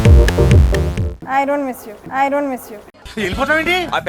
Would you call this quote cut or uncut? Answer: cut